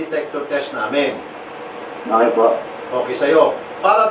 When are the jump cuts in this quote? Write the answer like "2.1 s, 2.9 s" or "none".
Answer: none